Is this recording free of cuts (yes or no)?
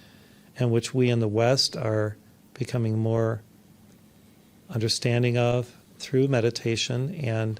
yes